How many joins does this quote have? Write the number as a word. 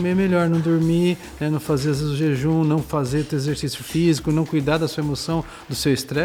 zero